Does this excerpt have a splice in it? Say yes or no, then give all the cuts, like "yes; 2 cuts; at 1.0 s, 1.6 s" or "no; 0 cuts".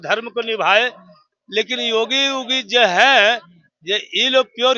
no; 0 cuts